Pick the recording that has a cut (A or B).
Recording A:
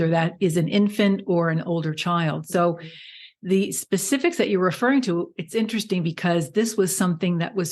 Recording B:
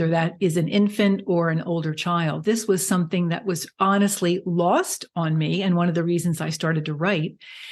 B